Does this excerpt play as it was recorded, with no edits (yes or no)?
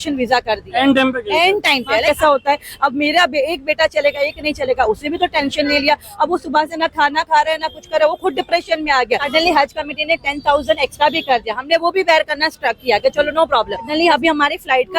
no